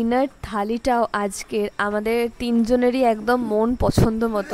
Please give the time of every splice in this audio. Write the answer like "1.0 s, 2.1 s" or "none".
none